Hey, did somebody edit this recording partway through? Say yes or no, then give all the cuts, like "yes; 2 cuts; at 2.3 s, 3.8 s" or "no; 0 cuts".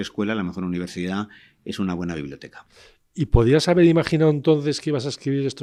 no; 0 cuts